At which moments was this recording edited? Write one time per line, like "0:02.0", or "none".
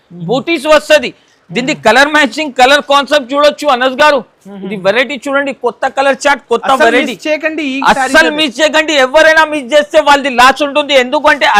none